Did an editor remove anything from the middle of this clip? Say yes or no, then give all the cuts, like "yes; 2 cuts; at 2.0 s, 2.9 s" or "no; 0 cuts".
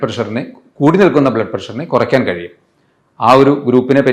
no; 0 cuts